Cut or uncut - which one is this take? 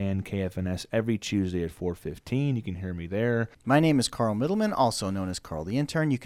cut